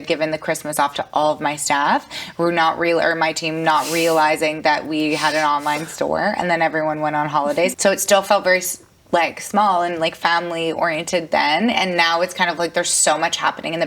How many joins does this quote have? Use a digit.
1